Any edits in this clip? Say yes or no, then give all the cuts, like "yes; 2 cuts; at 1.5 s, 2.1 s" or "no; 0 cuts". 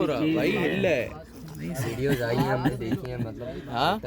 no; 0 cuts